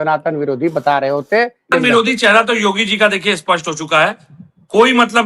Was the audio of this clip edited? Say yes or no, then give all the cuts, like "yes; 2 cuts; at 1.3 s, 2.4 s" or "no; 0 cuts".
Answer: yes; 1 cut; at 1.7 s